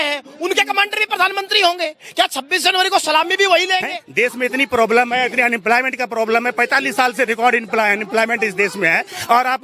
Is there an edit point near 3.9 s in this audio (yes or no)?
yes